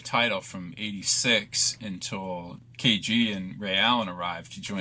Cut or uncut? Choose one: cut